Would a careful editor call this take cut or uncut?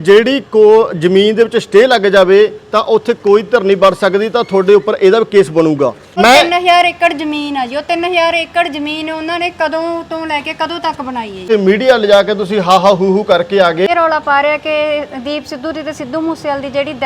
cut